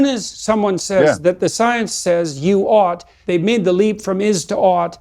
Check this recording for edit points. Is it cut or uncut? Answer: cut